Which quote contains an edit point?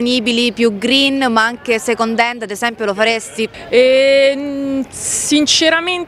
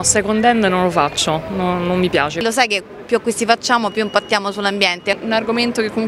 second; 2 cuts; at 2.4 s, 5.2 s

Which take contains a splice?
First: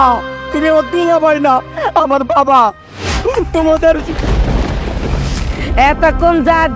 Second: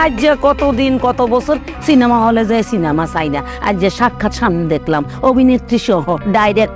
first; 1 cut; at 5.4 s

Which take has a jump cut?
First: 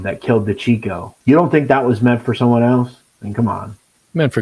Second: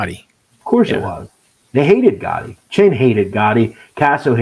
first; 1 cut; at 1.1 s

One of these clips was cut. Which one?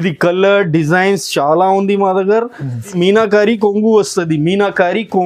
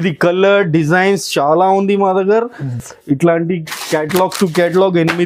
first; 1 cut; at 2.9 s

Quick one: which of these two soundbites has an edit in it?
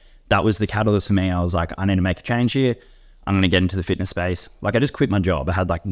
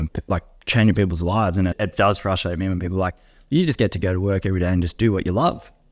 second; 1 cut; at 1.7 s

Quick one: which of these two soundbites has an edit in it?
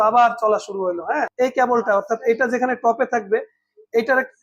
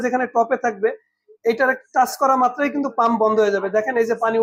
first; 1 cut; at 1.3 s

